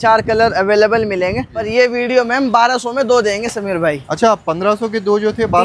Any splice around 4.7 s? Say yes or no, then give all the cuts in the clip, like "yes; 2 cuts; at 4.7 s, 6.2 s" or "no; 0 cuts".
no; 1 cut; at 1.7 s